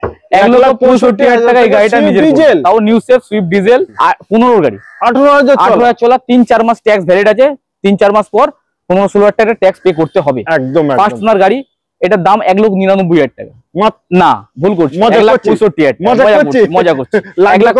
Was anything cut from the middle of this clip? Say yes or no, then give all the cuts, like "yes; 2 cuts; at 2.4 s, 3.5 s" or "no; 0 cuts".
yes; 1 cut; at 3.9 s